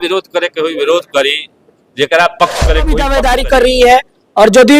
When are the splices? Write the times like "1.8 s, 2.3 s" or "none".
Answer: 3.0 s